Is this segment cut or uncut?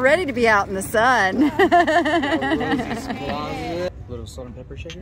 cut